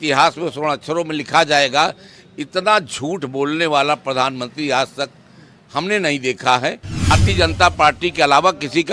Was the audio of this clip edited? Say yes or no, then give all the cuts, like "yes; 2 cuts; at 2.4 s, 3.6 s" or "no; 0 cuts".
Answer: yes; 1 cut; at 7.1 s